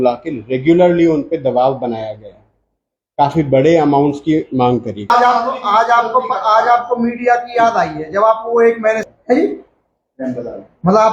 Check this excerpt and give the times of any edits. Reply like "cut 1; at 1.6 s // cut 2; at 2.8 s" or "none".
cut 1; at 5.1 s // cut 2; at 9.0 s